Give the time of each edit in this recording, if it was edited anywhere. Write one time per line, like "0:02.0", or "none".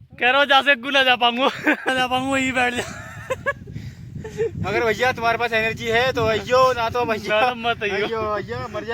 0:01.9